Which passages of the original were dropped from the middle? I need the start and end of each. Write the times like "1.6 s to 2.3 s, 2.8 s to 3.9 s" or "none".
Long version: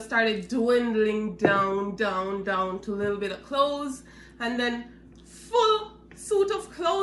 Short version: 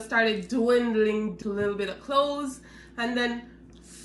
1.3 s to 2.8 s